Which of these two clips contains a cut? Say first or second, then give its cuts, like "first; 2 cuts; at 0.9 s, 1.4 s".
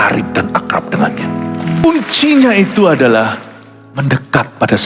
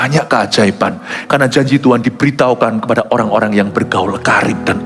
first; 1 cut; at 1.8 s